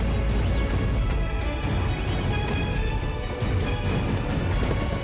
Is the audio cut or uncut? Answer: uncut